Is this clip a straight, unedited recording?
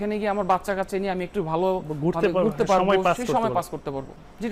yes; 0 cuts

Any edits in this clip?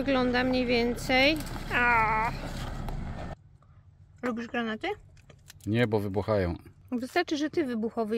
yes; 2 cuts; at 3.4 s, 6.7 s

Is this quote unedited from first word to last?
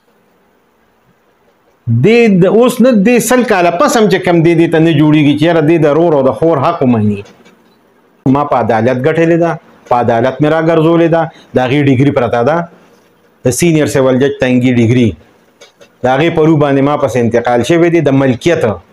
no; 1 cut; at 8.2 s

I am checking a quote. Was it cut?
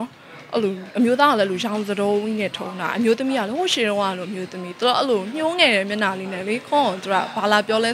no; 0 cuts

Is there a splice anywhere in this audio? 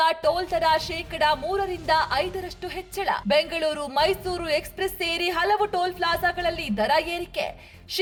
no; 0 cuts

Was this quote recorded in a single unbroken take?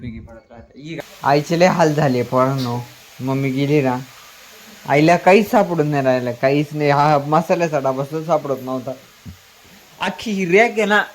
no; 1 cut; at 1.0 s

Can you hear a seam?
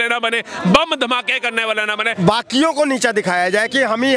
yes; 1 cut; at 2.1 s

